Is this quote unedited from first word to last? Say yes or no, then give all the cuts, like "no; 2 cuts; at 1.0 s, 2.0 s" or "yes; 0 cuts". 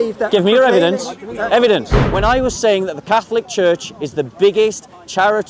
no; 1 cut; at 2.0 s